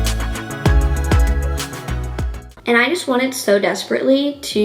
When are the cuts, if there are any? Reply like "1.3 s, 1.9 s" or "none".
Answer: 2.5 s